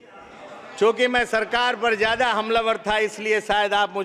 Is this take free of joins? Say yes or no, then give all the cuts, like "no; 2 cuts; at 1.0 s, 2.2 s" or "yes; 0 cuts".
yes; 0 cuts